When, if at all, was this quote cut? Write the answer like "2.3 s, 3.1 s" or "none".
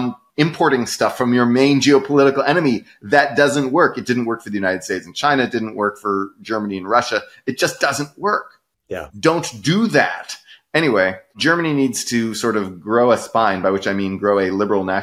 none

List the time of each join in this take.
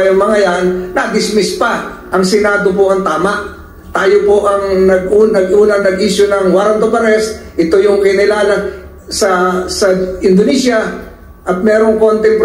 2.0 s

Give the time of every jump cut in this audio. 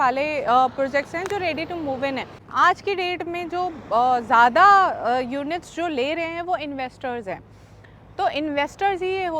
2.4 s

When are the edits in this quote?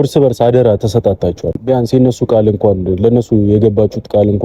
1.6 s

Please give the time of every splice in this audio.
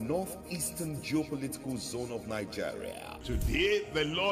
2.9 s

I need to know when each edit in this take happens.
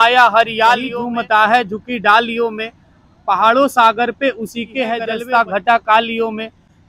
1.0 s, 5.1 s

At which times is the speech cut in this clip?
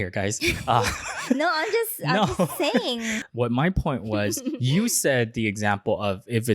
3.2 s

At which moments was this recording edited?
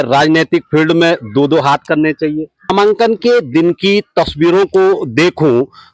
2.7 s

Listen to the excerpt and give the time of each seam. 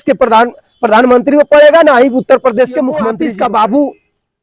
3.1 s

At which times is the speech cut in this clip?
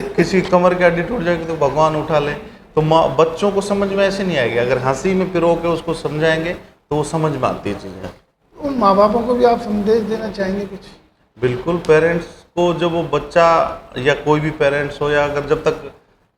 none

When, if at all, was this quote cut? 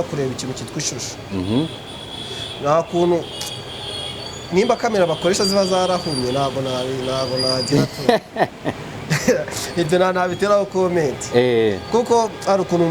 none

